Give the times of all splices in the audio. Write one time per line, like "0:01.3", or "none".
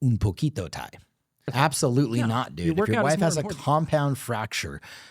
0:01.5